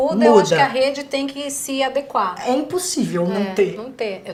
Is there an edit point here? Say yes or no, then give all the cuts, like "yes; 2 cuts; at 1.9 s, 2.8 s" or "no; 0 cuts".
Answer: no; 0 cuts